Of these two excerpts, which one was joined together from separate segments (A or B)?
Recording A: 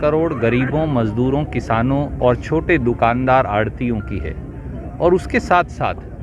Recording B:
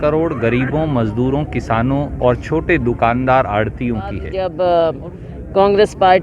B